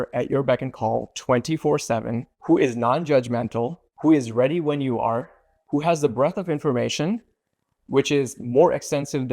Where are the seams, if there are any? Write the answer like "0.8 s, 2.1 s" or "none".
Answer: 3.8 s